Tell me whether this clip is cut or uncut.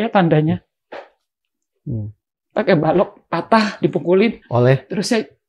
uncut